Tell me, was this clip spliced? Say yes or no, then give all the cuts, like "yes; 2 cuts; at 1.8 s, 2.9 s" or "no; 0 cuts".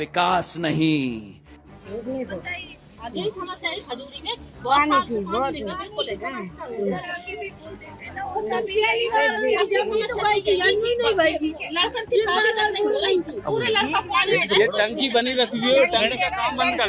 no; 0 cuts